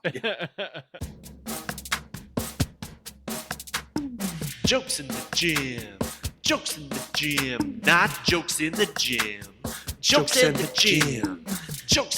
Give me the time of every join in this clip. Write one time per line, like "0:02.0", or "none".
0:00.9